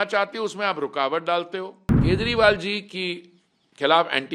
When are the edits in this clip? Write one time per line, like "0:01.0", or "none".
0:01.8